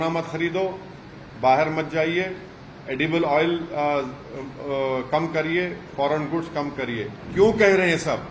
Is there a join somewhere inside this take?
yes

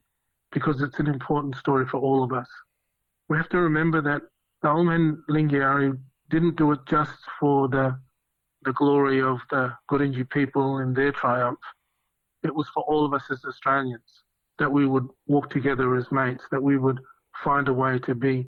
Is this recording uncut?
yes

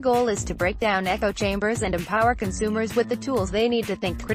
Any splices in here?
no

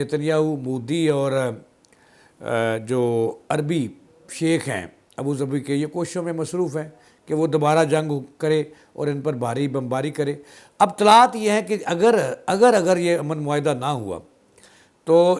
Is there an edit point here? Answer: no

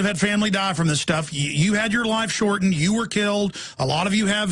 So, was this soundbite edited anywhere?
yes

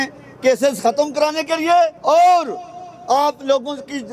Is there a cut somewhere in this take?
yes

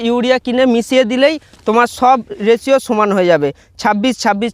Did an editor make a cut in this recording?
no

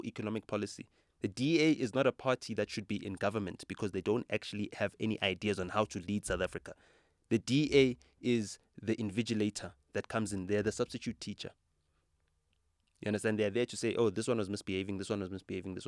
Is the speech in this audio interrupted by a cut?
no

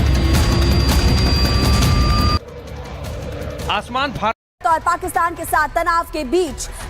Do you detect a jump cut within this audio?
yes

